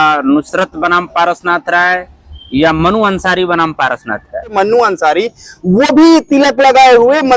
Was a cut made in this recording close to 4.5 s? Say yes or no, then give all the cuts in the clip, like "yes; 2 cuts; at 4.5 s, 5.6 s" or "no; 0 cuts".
yes; 1 cut; at 4.5 s